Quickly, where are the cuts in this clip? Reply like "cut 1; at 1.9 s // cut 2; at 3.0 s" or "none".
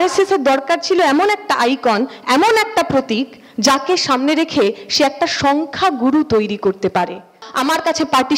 cut 1; at 7.4 s